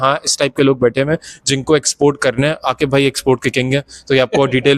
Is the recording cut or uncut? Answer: uncut